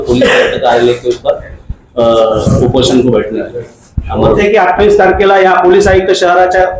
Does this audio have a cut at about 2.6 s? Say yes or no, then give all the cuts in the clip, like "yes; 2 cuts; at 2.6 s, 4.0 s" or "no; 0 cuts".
no; 1 cut; at 4.4 s